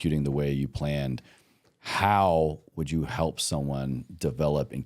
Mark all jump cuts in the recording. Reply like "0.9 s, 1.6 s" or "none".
none